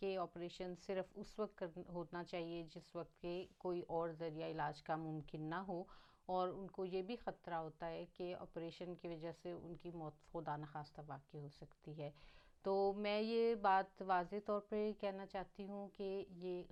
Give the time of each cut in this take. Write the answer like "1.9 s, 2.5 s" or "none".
none

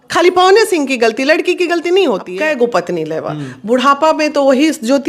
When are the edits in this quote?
2.3 s

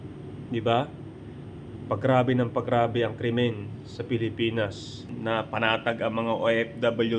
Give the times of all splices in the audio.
5.1 s

